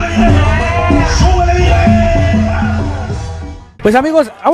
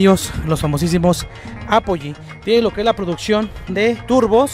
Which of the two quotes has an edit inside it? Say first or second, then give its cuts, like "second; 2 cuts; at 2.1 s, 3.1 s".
first; 1 cut; at 3.5 s